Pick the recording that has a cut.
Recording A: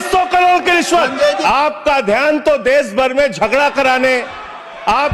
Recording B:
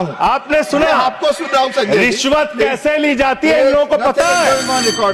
A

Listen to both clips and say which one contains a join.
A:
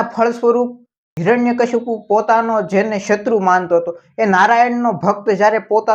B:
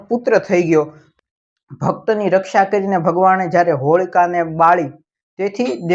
B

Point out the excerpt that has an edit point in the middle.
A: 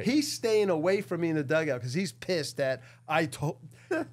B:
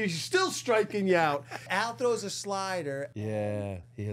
B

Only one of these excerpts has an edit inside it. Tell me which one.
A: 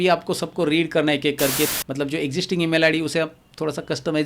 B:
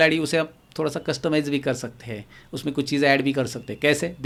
A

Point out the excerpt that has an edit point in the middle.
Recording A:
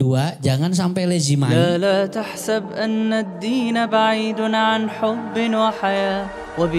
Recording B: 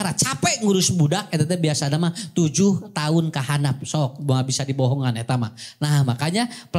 A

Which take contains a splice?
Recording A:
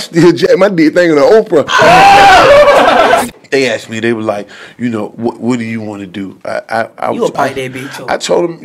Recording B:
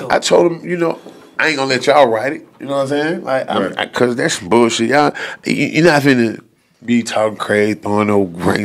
A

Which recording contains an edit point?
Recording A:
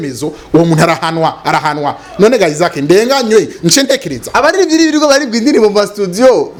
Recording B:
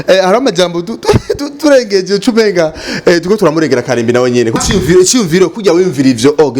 B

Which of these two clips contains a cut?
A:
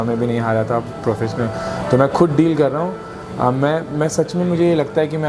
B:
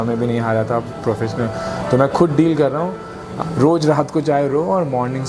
B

